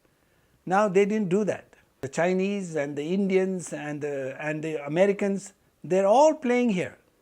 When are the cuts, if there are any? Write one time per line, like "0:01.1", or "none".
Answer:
0:02.0